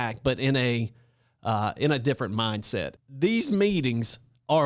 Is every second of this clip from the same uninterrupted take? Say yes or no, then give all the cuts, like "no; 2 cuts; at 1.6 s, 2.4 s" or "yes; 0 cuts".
no; 1 cut; at 2.9 s